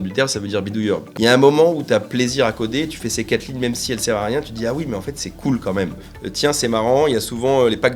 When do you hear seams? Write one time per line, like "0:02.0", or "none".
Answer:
0:01.1
0:06.1